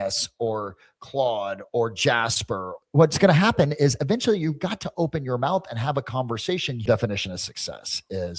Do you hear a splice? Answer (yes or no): yes